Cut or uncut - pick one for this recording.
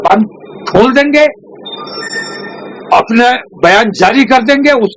uncut